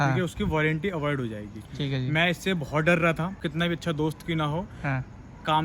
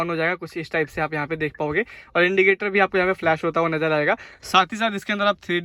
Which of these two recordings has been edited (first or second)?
first